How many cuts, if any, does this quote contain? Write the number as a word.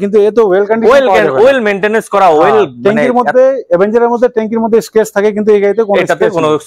zero